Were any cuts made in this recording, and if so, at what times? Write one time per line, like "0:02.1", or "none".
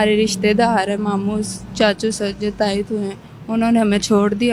none